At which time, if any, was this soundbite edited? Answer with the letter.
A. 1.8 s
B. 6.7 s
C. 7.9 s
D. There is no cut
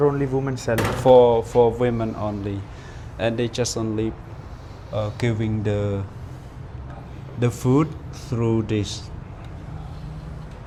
D